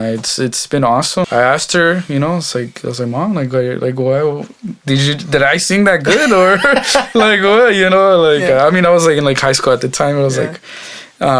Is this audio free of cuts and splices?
no; 1 cut; at 1.3 s

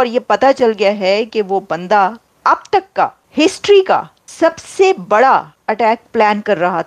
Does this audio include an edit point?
yes; 4 cuts; at 2.3 s, 3.2 s, 4.2 s, 5.6 s

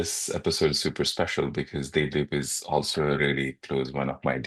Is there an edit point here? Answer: yes; 1 cut; at 3.2 s

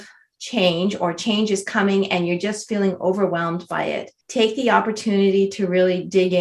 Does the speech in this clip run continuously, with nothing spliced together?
no; 1 cut; at 4.1 s

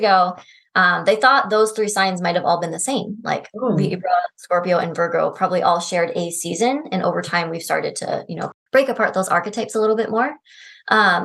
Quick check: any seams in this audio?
yes; 1 cut; at 8.5 s

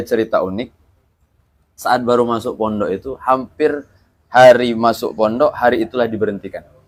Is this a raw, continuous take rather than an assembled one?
yes; 0 cuts

